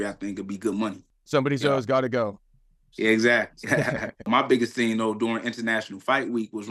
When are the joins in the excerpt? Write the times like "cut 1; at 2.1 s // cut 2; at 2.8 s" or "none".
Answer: cut 1; at 1.3 s // cut 2; at 4.2 s